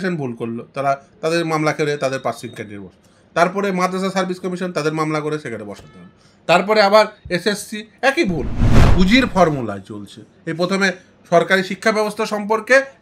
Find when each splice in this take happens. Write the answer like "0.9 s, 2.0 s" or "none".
8.9 s